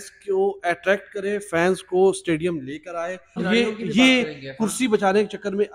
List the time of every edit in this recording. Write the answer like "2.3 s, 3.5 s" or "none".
3.4 s